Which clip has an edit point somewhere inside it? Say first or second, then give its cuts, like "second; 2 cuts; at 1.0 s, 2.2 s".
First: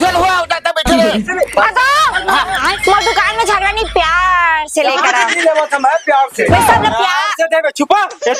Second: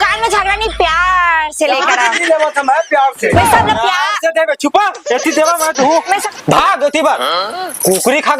second; 1 cut; at 6.4 s